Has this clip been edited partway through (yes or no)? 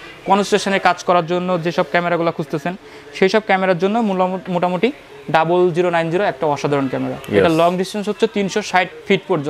no